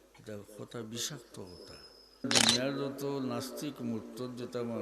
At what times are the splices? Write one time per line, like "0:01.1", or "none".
0:02.2